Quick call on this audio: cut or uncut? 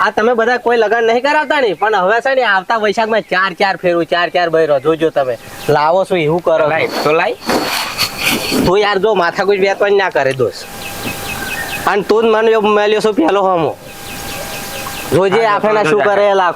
uncut